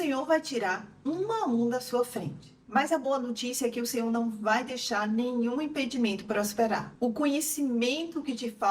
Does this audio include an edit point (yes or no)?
yes